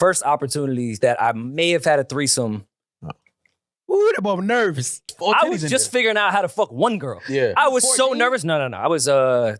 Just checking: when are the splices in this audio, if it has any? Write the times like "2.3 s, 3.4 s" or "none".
0.9 s, 5.2 s